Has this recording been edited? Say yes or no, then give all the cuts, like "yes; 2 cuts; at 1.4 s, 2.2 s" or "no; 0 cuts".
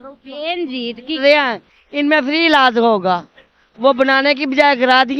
yes; 1 cut; at 1.2 s